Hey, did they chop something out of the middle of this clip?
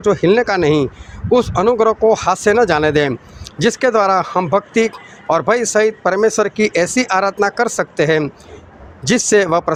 no; 0 cuts

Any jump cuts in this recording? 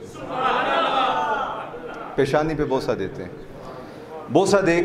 no; 0 cuts

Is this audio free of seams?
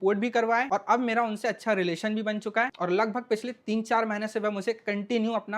yes; 0 cuts

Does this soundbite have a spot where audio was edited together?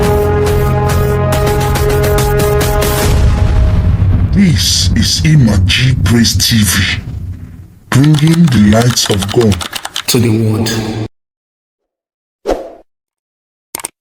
no; 0 cuts

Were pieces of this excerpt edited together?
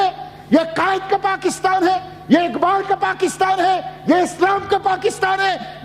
no; 0 cuts

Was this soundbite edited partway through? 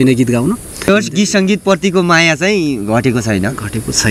yes; 1 cut; at 0.9 s

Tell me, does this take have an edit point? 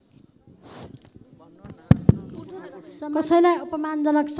yes; 1 cut; at 2.9 s

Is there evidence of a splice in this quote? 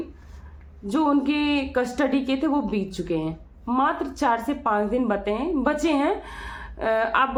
no; 0 cuts

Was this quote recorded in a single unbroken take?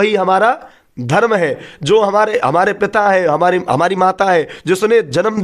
yes; 0 cuts

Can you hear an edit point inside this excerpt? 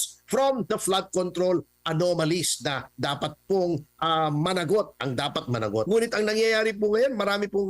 yes; 1 cut; at 5.9 s

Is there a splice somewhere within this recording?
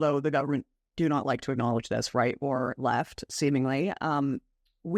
no; 0 cuts

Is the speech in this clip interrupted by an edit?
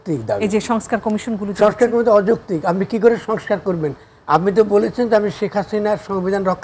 no; 0 cuts

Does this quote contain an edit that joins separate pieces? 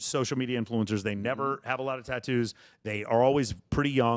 no; 0 cuts

